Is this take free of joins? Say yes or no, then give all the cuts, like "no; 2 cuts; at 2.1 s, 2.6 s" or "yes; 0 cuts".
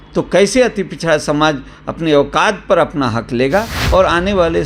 no; 1 cut; at 3.8 s